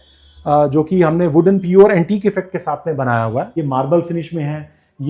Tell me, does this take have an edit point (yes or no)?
yes